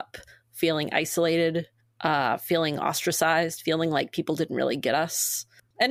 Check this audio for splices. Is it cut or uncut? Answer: uncut